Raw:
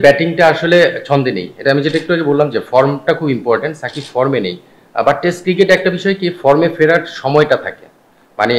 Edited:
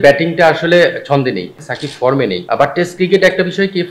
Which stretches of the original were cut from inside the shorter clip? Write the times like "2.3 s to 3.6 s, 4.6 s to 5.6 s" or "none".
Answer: 1.6 s to 3.7 s, 4.6 s to 4.9 s